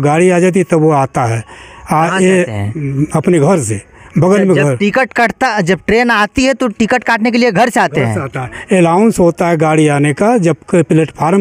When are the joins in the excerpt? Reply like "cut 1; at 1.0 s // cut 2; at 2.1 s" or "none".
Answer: none